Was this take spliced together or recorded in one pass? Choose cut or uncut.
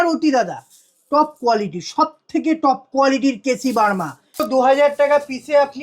cut